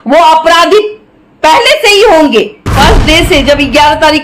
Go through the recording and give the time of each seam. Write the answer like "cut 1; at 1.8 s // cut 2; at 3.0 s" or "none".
cut 1; at 2.7 s